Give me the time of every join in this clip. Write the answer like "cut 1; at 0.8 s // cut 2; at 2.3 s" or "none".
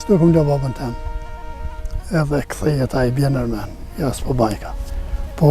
none